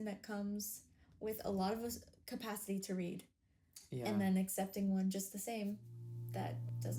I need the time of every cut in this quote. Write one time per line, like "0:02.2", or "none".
none